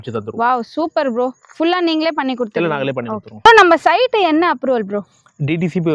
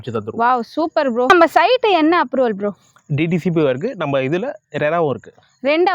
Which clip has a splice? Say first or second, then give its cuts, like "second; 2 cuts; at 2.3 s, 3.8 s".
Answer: second; 1 cut; at 1.3 s